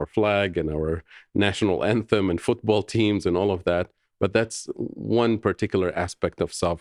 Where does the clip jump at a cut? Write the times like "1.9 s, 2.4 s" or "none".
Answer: none

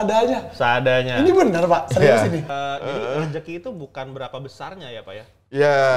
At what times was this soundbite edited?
2.5 s

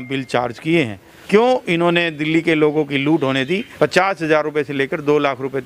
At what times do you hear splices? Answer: 1.1 s, 3.7 s

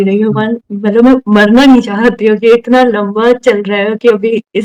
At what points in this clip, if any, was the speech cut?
none

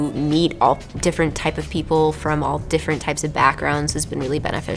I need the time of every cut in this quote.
none

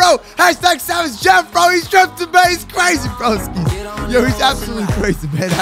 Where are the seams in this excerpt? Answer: none

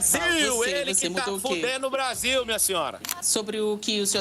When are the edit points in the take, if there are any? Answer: 3.1 s

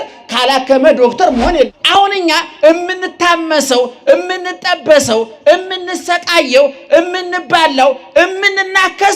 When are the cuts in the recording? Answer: 1.8 s

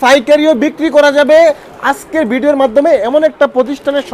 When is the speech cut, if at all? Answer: none

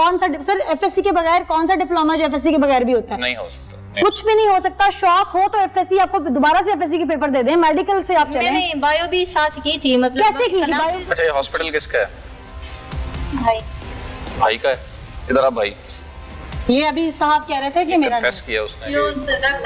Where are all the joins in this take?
11.0 s

